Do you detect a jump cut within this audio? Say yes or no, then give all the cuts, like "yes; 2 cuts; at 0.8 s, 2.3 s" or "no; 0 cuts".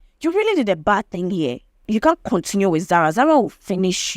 yes; 1 cut; at 1.8 s